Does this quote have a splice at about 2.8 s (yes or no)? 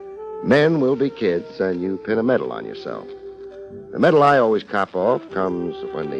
yes